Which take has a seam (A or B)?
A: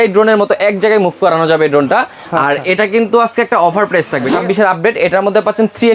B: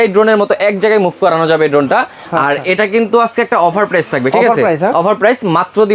A